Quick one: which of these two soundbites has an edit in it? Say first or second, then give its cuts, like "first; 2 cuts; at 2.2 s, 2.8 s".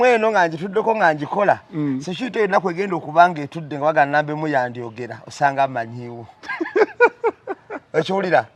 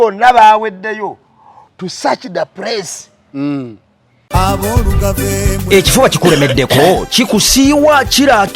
second; 1 cut; at 4.3 s